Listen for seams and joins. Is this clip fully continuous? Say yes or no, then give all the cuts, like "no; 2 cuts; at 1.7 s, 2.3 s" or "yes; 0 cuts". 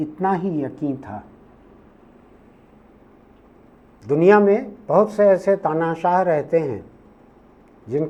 yes; 0 cuts